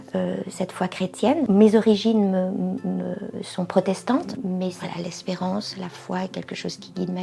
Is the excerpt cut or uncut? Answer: uncut